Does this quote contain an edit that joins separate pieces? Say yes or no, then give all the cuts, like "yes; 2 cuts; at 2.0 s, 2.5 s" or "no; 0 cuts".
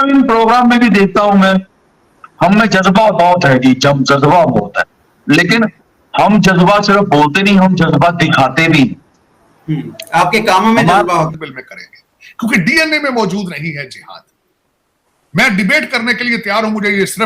yes; 1 cut; at 11.4 s